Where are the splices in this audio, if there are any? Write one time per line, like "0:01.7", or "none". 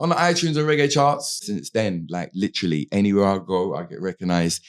0:01.5